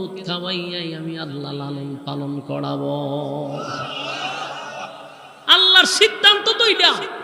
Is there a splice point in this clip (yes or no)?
no